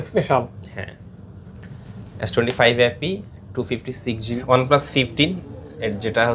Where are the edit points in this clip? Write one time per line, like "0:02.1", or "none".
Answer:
0:04.3